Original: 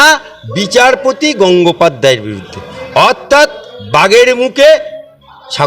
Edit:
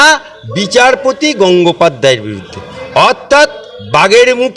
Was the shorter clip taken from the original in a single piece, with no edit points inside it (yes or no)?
yes